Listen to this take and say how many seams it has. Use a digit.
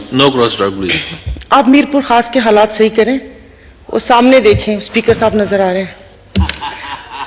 0